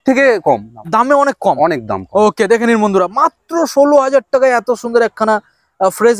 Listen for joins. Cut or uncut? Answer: uncut